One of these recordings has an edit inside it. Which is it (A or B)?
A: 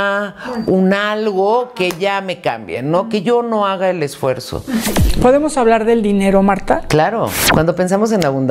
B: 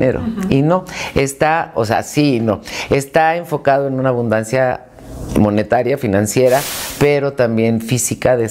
A